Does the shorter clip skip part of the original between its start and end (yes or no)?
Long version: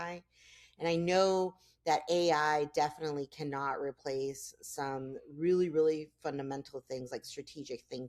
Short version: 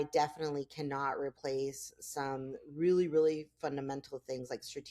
no